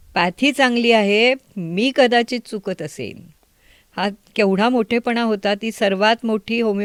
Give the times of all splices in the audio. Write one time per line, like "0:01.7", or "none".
none